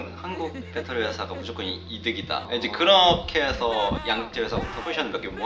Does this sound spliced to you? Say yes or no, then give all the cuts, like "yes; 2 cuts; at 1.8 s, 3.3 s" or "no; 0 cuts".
no; 0 cuts